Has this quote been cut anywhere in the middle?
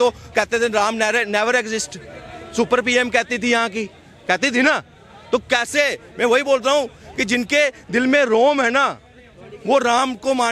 no; 0 cuts

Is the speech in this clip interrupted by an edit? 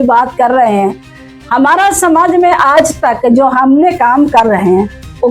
no; 0 cuts

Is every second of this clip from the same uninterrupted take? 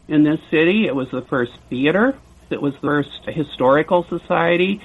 no; 1 cut; at 2.5 s

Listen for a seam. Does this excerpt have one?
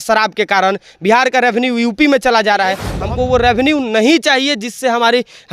yes; 1 cut; at 2.9 s

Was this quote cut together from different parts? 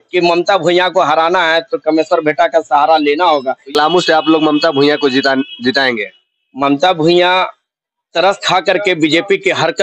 yes; 1 cut; at 3.7 s

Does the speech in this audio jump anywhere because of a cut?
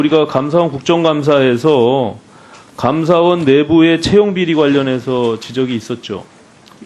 no; 0 cuts

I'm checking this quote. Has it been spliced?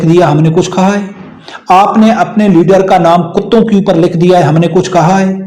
no; 0 cuts

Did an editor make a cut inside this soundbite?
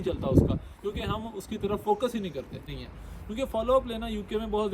yes; 1 cut; at 2.8 s

